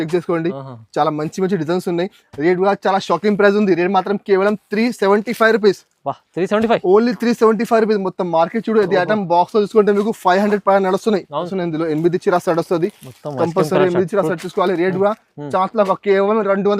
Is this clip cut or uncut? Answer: cut